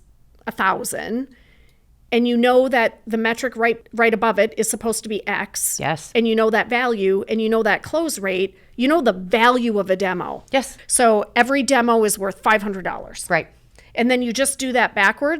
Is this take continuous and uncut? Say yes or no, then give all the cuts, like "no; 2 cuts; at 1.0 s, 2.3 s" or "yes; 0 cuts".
no; 1 cut; at 10.7 s